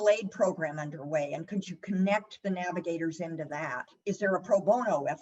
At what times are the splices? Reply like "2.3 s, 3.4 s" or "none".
3.9 s